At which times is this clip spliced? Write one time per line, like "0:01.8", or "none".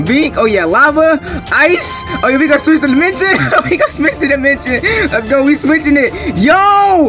none